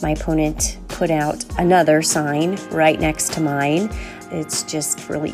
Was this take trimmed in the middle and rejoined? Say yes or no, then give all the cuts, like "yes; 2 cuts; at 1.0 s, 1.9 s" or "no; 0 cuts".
yes; 1 cut; at 4.1 s